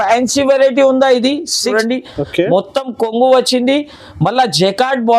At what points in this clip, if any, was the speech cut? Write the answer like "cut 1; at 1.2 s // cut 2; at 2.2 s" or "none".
cut 1; at 1.7 s